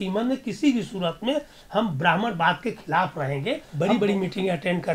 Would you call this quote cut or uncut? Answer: cut